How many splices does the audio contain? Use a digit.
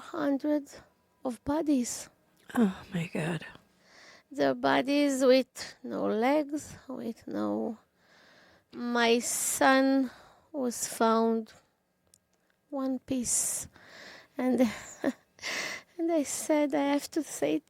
1